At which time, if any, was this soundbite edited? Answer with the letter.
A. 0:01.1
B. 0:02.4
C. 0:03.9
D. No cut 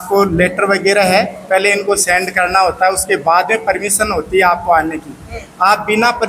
D